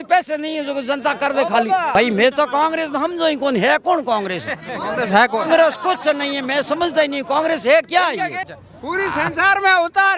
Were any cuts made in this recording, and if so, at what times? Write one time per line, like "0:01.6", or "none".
0:02.0
0:08.4